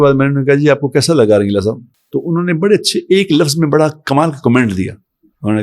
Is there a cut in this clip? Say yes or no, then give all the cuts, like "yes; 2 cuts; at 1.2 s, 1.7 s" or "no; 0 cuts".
yes; 1 cut; at 1.9 s